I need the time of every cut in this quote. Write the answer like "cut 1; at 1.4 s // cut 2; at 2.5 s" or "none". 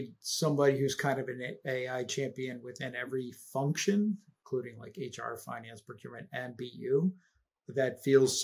none